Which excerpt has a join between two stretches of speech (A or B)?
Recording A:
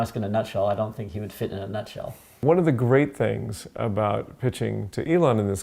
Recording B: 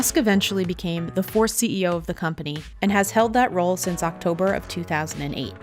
A